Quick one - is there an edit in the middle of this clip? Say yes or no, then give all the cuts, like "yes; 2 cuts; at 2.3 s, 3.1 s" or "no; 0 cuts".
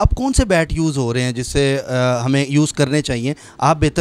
no; 0 cuts